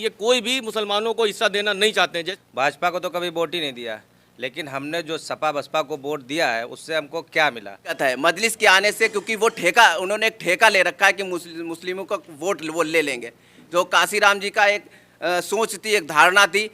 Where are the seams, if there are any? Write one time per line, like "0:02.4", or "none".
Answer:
0:02.2
0:08.0